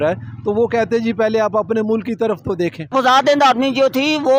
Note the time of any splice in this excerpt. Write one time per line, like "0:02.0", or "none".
0:02.8